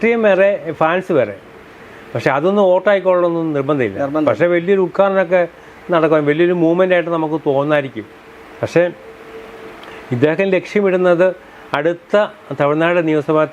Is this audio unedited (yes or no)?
yes